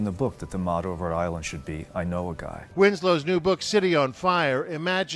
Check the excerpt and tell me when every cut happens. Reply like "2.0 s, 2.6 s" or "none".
2.6 s